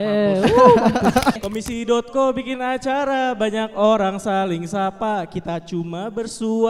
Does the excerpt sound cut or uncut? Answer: cut